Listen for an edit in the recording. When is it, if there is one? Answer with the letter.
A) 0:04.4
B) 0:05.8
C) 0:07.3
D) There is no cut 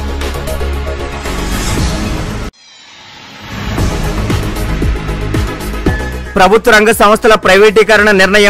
B